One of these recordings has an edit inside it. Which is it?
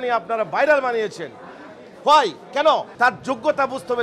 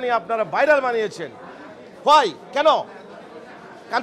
first; 1 cut; at 2.9 s

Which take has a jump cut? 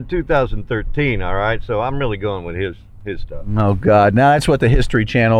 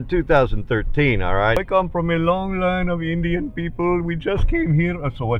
second; 1 cut; at 1.6 s

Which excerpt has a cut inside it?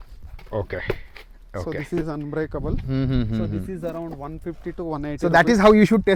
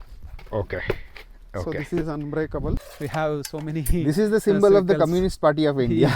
second; 1 cut; at 2.8 s

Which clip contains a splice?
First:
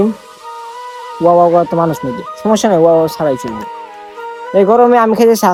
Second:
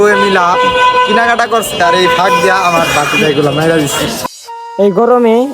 second; 1 cut; at 4.2 s

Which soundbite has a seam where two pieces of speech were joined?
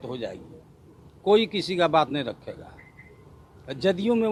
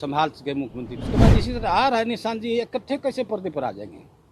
second; 1 cut; at 1.2 s

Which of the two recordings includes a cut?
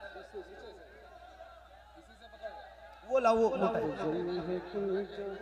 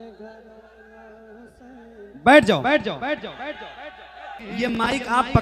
second; 1 cut; at 4.4 s

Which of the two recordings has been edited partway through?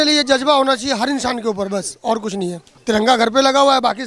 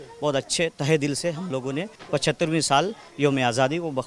first; 1 cut; at 2.7 s

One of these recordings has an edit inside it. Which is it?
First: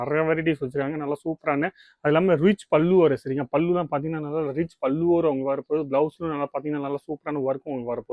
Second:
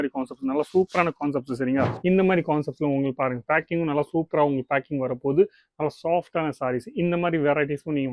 second; 1 cut; at 1.9 s

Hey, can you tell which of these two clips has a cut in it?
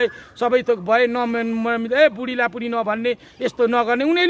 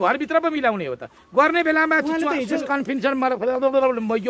second; 1 cut; at 2.6 s

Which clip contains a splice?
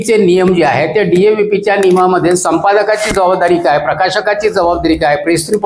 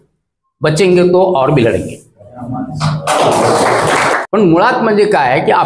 second; 1 cut; at 4.2 s

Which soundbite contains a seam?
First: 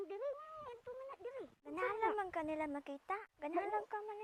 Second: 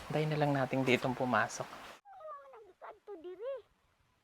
second; 1 cut; at 2.0 s

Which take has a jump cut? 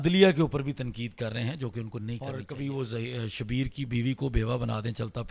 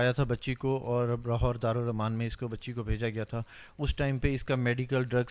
first; 1 cut; at 2.4 s

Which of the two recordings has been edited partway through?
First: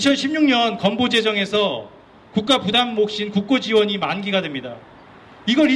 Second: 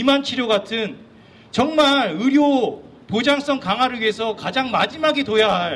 second; 1 cut; at 3.2 s

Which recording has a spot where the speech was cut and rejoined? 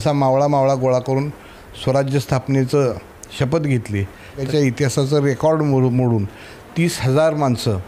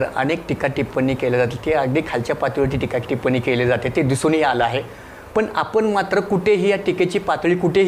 first; 1 cut; at 4.5 s

